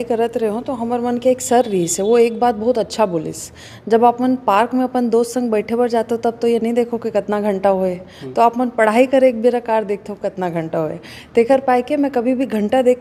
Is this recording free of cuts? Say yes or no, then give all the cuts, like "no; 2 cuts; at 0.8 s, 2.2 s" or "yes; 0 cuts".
yes; 0 cuts